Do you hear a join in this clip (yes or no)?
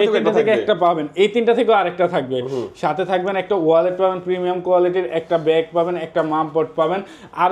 no